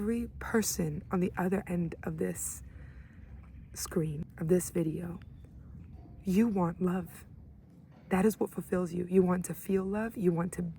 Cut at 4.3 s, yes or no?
yes